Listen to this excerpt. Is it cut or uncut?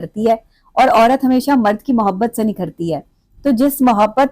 uncut